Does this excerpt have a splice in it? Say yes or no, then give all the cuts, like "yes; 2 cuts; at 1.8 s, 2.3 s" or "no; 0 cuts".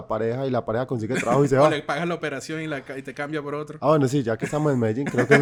no; 0 cuts